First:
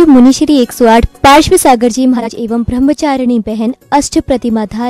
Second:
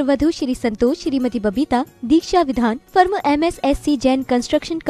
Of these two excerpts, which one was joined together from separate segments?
first; 1 cut; at 2.2 s

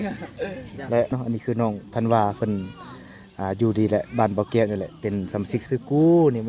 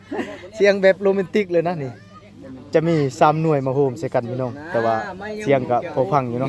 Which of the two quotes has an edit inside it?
first; 2 cuts; at 1.1 s, 5.6 s

